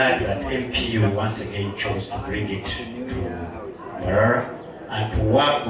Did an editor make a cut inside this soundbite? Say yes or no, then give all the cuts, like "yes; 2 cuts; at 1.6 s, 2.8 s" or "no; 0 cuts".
no; 0 cuts